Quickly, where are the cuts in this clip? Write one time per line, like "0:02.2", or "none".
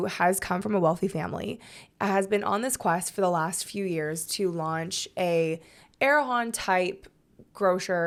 none